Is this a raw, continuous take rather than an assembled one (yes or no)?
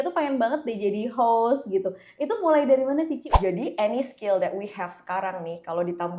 no